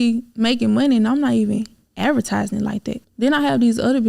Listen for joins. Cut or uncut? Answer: cut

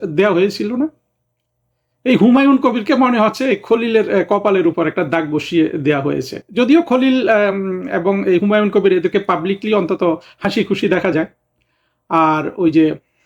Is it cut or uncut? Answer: uncut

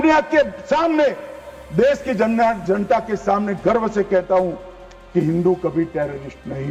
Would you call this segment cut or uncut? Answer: uncut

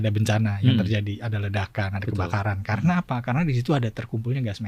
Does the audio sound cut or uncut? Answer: uncut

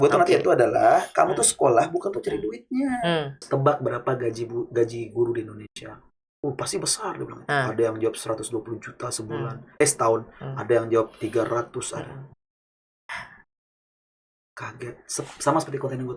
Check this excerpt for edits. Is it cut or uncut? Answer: cut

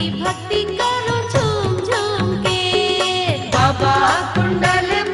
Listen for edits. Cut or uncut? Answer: cut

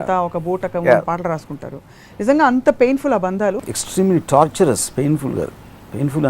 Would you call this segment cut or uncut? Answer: cut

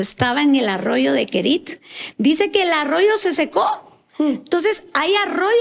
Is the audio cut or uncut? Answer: uncut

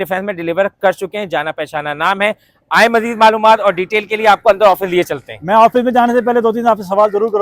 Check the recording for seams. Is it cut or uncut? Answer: uncut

